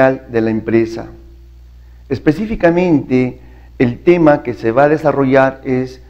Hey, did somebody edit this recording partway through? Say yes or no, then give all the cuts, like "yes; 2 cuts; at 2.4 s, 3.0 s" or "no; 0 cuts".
yes; 1 cut; at 4.7 s